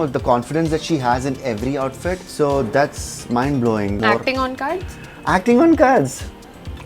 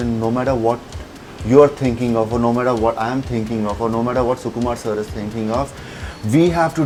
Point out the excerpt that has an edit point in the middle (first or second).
first